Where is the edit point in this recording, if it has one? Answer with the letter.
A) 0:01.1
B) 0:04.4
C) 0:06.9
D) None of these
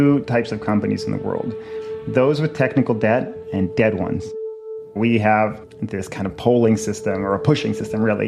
B